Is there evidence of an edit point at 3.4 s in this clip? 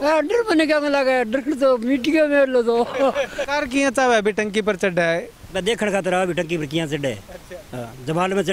yes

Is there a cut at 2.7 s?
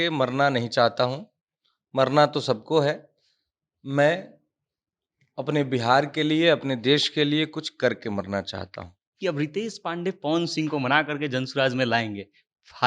no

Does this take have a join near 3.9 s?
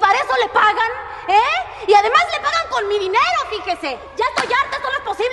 no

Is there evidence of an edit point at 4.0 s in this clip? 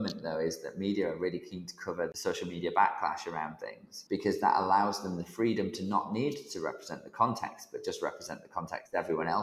yes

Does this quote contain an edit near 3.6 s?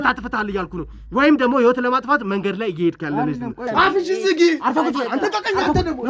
yes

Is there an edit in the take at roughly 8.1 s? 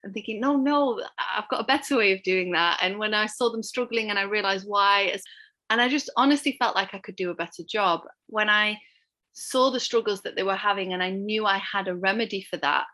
yes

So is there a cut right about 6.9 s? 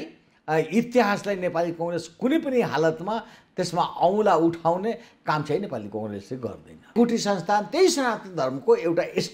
yes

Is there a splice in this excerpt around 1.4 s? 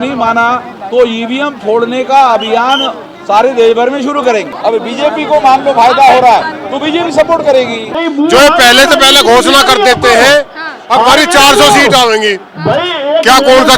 no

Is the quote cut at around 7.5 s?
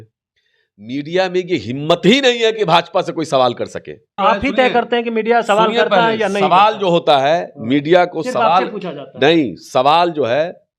no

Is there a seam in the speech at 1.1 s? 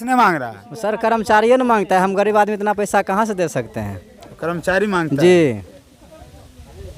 no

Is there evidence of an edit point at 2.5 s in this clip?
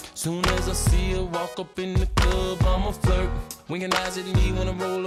no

